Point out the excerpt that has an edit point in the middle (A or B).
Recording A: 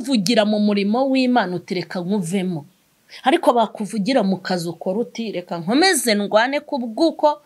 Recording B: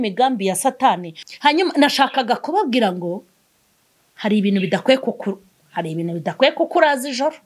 B